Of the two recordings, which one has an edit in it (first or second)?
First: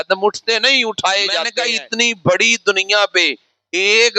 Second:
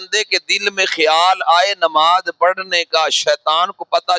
first